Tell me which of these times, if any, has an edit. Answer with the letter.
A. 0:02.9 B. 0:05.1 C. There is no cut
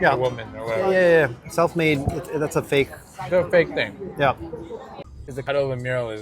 B